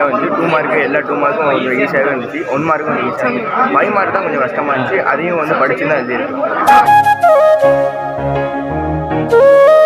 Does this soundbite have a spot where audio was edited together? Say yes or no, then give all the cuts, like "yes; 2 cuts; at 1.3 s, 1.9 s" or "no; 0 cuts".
no; 0 cuts